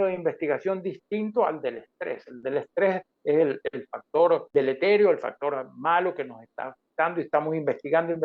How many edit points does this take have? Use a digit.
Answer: 1